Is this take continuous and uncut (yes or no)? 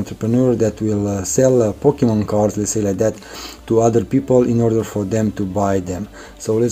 yes